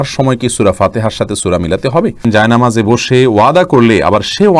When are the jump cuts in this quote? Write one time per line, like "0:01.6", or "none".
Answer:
0:02.2